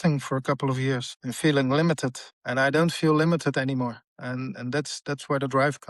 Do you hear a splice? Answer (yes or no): no